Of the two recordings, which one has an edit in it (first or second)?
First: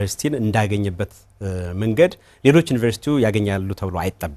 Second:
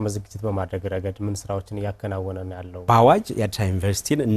second